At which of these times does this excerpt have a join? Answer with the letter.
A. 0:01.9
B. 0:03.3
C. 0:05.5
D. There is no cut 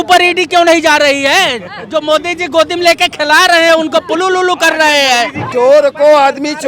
C